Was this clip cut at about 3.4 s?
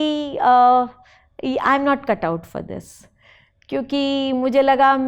no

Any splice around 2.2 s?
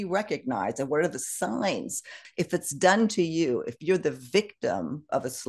yes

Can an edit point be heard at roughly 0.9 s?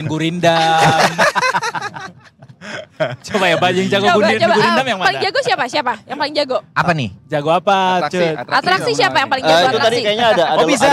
no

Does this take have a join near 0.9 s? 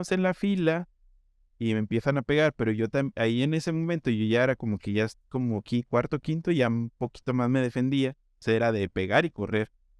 no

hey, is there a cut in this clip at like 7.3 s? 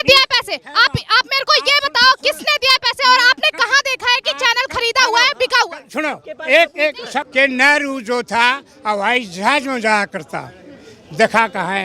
yes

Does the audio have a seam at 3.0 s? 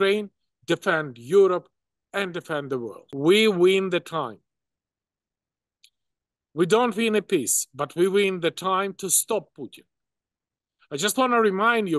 yes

